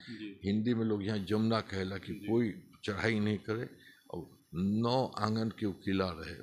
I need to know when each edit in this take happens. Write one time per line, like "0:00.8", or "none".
none